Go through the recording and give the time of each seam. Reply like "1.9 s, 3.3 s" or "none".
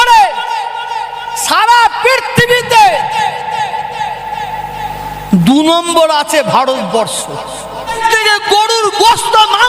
8.0 s